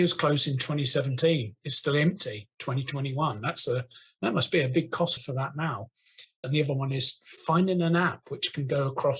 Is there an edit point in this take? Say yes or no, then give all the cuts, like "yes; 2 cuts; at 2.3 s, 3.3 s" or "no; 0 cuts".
yes; 1 cut; at 6.3 s